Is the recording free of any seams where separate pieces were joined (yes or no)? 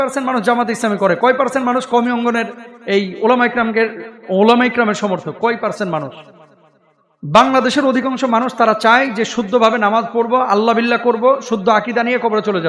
yes